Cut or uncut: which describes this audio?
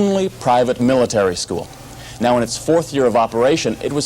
uncut